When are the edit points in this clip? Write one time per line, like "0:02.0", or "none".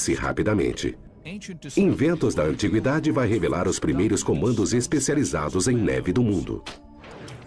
none